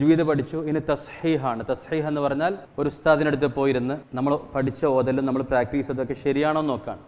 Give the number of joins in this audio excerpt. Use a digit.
2